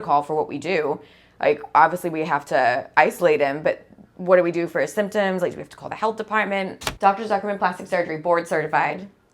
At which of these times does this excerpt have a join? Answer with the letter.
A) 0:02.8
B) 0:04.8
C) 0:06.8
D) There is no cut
C